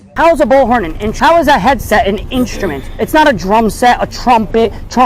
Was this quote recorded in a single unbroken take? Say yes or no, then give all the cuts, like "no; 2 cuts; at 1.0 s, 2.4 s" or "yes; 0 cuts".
no; 1 cut; at 1.1 s